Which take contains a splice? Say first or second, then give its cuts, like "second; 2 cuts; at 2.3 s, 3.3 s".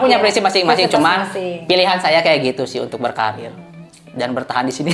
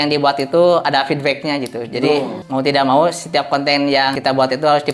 second; 2 cuts; at 2.4 s, 4.1 s